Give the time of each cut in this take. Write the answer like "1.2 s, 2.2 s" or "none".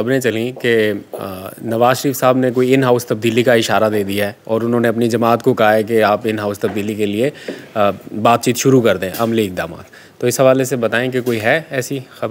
none